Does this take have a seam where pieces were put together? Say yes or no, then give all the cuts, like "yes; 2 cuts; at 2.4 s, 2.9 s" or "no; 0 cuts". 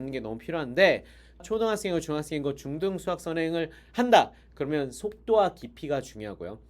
yes; 1 cut; at 1.4 s